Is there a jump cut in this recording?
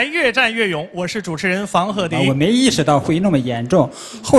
yes; 1 cut; at 2.1 s

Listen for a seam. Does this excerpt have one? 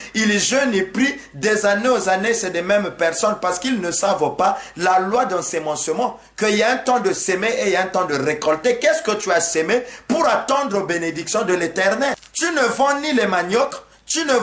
yes; 1 cut; at 12.3 s

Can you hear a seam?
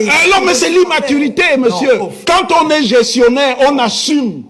no; 0 cuts

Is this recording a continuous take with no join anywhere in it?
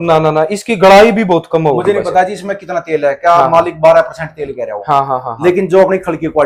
yes; 0 cuts

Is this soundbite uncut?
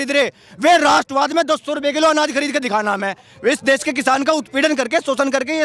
yes; 0 cuts

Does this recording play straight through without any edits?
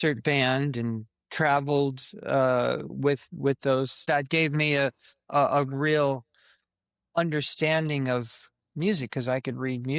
no; 1 cut; at 4.0 s

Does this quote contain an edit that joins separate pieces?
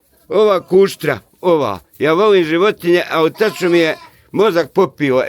no; 0 cuts

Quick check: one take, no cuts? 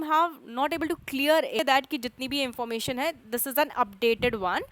no; 1 cut; at 1.6 s

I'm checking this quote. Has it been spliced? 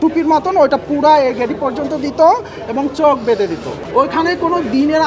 yes; 1 cut; at 3.8 s

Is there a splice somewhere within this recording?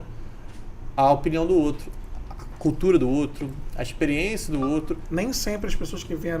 yes; 1 cut; at 5.0 s

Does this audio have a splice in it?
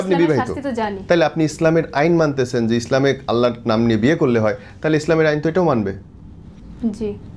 no; 0 cuts

